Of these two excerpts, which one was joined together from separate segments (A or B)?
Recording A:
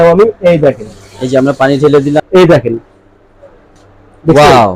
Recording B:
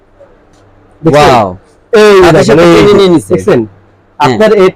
A